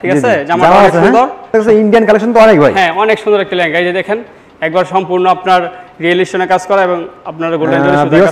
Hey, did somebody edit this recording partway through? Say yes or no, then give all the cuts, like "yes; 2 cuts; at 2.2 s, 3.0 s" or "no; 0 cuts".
yes; 1 cut; at 1.4 s